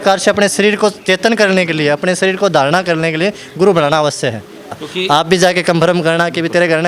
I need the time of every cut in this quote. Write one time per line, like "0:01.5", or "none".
0:04.8